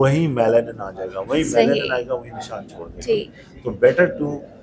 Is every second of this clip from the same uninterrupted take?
yes; 0 cuts

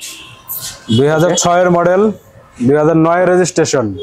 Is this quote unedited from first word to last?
yes; 0 cuts

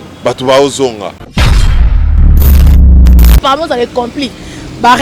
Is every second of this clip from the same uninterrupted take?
no; 1 cut; at 3.4 s

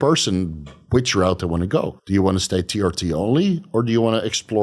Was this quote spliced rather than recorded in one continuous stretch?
yes; 1 cut; at 2.0 s

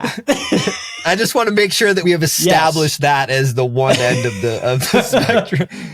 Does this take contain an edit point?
yes; 2 cuts; at 1.0 s, 2.0 s

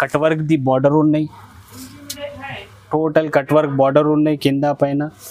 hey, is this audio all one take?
yes; 0 cuts

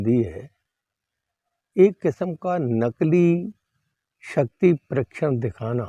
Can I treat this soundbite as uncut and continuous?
yes; 0 cuts

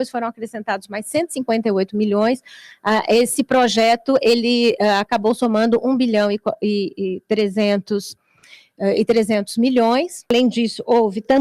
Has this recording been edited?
yes; 1 cut; at 10.3 s

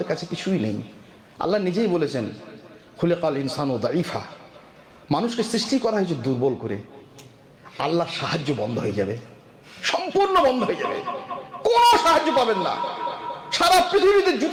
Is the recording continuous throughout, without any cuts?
yes; 0 cuts

